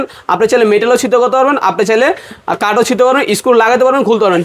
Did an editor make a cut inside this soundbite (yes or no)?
no